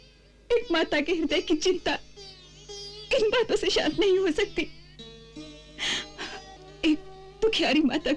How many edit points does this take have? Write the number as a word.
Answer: one